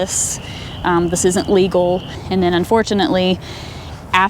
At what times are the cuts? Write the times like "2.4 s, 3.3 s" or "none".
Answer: 2.2 s